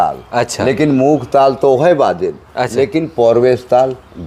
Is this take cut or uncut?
uncut